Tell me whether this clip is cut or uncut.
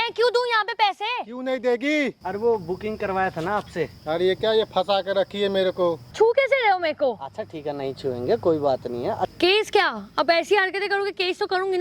cut